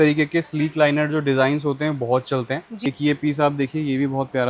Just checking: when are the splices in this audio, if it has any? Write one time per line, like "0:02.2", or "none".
0:02.7